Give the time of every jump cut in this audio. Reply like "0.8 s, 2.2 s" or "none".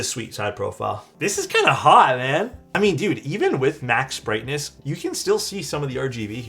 1.1 s, 2.6 s, 4.7 s

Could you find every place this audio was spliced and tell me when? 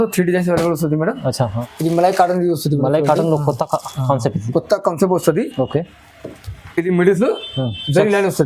1.6 s

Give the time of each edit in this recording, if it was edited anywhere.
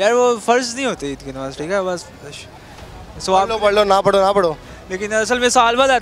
none

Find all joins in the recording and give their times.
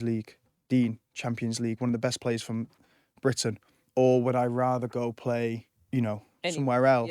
5.7 s

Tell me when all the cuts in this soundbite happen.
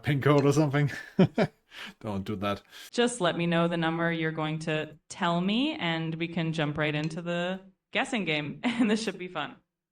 2.8 s

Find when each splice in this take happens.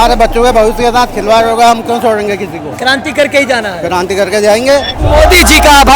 5.0 s

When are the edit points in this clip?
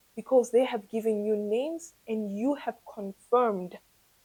none

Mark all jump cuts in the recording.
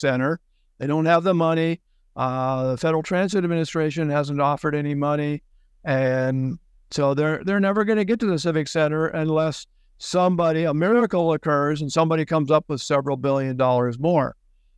none

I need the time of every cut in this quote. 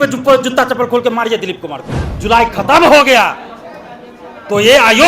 2.0 s

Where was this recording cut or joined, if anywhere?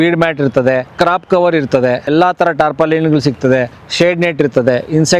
0.9 s, 2.1 s, 3.8 s

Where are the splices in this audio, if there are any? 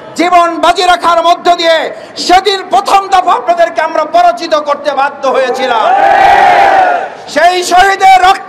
none

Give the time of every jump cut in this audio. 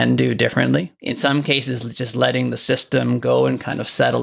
0.9 s

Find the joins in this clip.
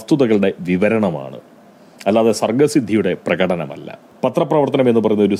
none

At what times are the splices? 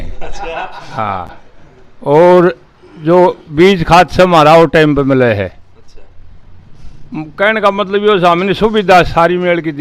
none

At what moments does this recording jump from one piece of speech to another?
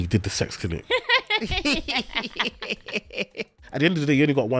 0.8 s, 3.6 s

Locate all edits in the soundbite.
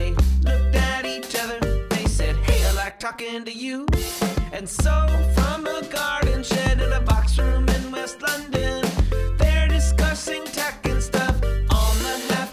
none

